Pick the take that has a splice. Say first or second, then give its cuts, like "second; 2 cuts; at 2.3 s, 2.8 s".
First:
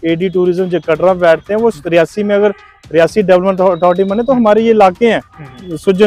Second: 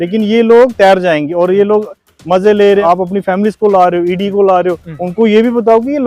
second; 1 cut; at 2.8 s